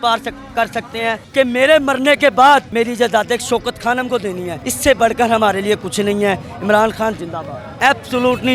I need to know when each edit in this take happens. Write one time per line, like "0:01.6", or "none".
0:01.2
0:02.7
0:07.8